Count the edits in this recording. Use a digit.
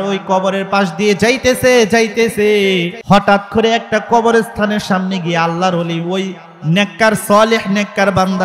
1